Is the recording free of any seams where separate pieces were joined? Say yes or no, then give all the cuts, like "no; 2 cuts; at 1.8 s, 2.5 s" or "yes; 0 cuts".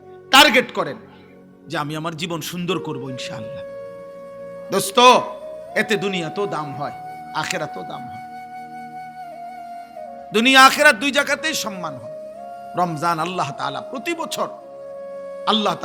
yes; 0 cuts